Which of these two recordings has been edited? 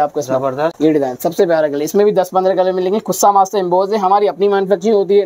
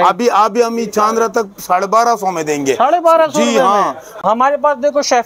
second; 1 cut; at 4.1 s

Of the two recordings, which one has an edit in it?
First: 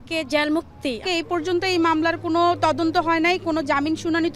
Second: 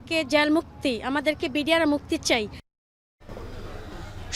first; 1 cut; at 1.0 s

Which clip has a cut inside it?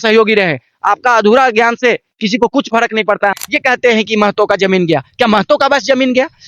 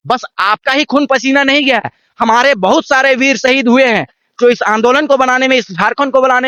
first; 1 cut; at 3.4 s

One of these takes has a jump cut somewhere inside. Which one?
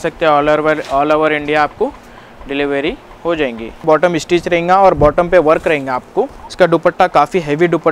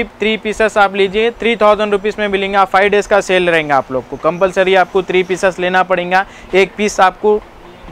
first; 2 cuts; at 3.8 s, 6.4 s

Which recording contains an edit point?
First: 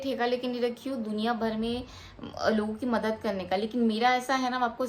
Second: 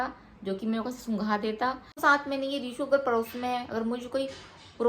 second; 1 cut; at 1.9 s

